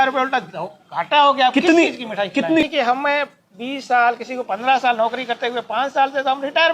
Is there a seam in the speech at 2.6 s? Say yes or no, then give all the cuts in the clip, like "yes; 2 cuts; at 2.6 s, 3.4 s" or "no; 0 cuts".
yes; 1 cut; at 2.6 s